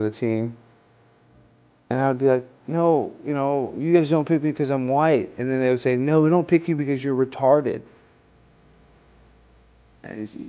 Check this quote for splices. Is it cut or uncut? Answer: uncut